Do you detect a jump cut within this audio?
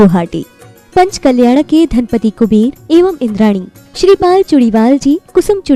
no; 0 cuts

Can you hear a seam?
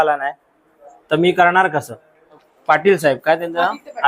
yes; 1 cut; at 2.5 s

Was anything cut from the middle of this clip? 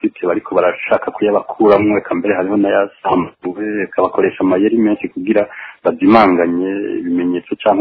no; 0 cuts

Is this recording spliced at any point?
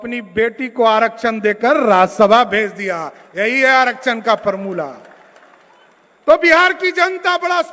no; 0 cuts

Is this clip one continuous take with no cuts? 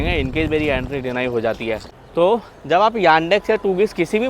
no; 1 cut; at 1.9 s

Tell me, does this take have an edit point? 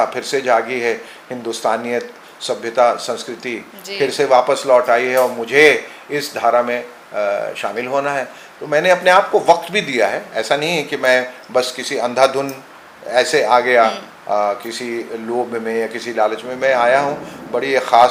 no; 0 cuts

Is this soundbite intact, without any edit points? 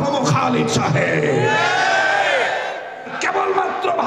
no; 1 cut; at 3.1 s

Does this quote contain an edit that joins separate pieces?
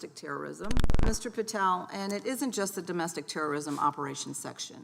yes; 1 cut; at 0.9 s

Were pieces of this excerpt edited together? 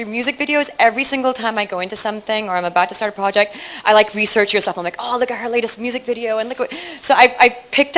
yes; 1 cut; at 4.8 s

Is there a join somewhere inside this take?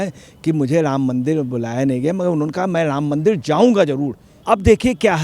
yes; 1 cut; at 4.3 s

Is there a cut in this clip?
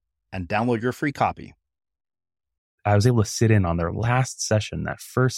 yes; 1 cut; at 2.7 s

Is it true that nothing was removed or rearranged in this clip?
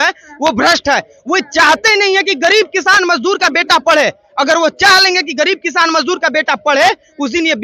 yes; 0 cuts

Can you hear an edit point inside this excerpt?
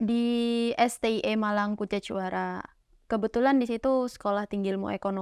no; 0 cuts

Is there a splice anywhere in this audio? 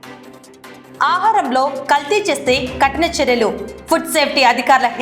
yes; 1 cut; at 0.9 s

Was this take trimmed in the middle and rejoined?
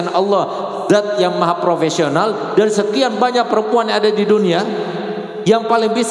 no; 0 cuts

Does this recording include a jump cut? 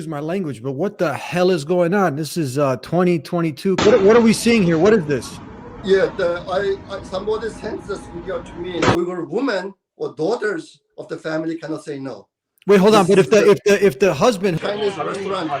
yes; 3 cuts; at 3.8 s, 9.0 s, 14.6 s

